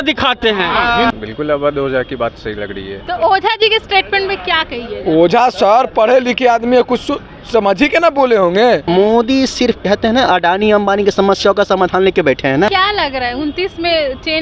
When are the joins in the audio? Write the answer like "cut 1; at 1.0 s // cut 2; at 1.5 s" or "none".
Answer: cut 1; at 1.1 s // cut 2; at 3.0 s // cut 3; at 8.8 s // cut 4; at 12.7 s